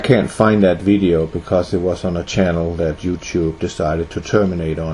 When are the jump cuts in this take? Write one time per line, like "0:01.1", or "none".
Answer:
0:02.4

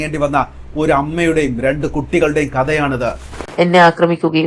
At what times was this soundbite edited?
0:03.4

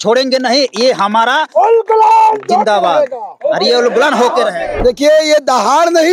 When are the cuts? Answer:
0:04.7

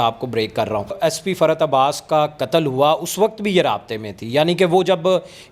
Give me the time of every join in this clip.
0:01.0

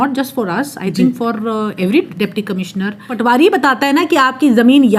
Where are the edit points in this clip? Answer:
0:03.1

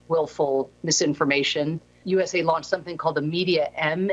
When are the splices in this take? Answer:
0:02.0

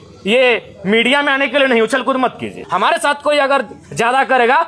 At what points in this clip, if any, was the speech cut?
0:02.6

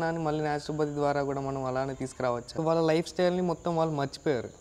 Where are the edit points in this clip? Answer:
0:02.6

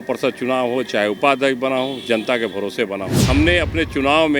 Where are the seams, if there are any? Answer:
0:03.2

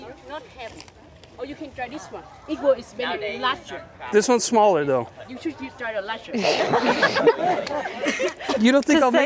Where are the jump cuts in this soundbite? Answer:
none

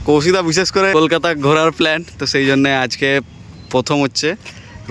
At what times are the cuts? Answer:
0:00.9

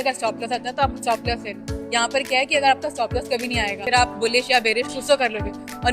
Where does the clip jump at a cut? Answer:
0:03.8

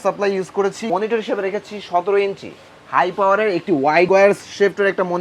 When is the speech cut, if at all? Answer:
0:00.9
0:04.1

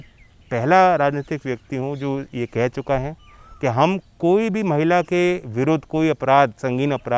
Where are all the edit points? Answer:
none

